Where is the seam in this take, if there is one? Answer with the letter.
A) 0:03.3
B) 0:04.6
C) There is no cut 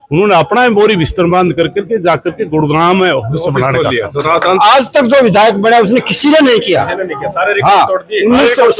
B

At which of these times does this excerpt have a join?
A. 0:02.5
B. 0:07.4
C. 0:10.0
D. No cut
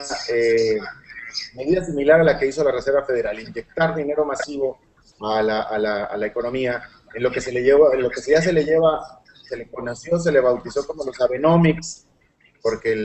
A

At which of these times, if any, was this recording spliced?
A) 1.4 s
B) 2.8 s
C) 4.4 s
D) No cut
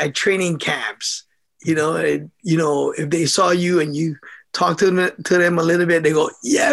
D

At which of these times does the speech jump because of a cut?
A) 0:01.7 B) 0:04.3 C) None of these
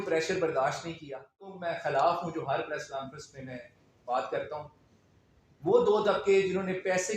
A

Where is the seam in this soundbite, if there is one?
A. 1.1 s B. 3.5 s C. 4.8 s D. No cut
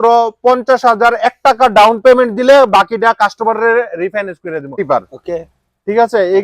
C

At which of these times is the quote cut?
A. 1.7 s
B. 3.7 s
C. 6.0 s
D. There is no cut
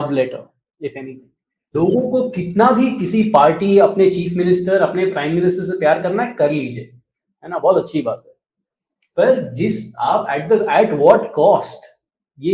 A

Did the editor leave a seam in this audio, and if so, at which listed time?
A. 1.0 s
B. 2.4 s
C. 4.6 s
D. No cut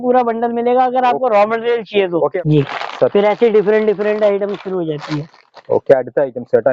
B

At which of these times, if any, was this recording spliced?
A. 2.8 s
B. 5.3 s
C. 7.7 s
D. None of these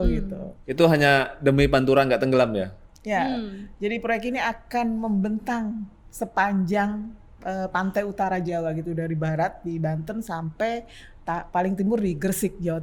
D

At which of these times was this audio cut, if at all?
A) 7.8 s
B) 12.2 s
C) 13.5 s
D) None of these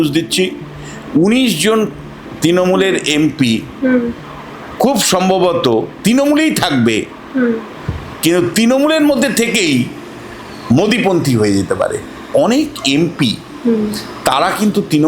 B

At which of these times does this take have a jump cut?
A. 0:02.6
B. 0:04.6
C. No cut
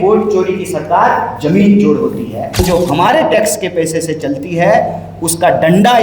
A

